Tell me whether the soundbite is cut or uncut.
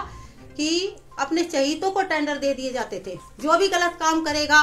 cut